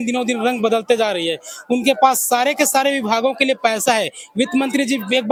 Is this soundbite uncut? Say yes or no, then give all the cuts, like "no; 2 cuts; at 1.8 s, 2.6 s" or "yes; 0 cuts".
yes; 0 cuts